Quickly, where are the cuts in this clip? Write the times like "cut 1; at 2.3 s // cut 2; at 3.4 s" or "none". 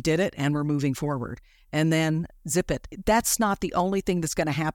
cut 1; at 2.9 s